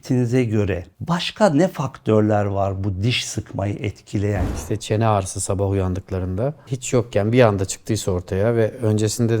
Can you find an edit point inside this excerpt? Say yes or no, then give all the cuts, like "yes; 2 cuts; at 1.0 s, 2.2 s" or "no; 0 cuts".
yes; 2 cuts; at 0.9 s, 4.4 s